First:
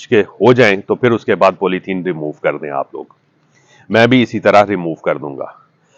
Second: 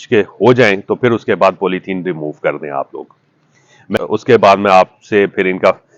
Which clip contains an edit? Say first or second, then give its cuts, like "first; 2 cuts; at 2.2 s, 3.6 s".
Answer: second; 1 cut; at 4.0 s